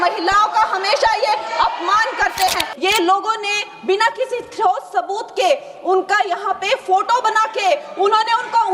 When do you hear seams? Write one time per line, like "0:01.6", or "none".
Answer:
0:02.7